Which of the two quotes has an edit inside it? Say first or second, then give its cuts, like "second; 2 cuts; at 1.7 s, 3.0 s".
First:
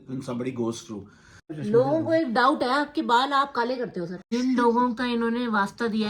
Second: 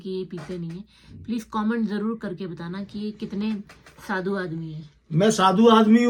first; 2 cuts; at 1.5 s, 4.3 s